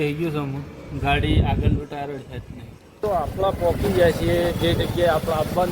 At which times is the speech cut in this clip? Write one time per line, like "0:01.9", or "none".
0:03.0